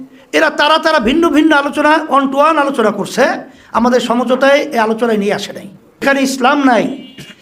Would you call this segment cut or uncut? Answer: cut